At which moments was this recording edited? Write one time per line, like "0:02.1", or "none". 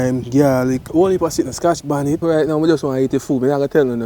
0:00.8
0:02.2